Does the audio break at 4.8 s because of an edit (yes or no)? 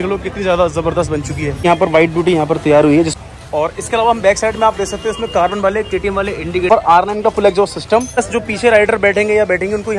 no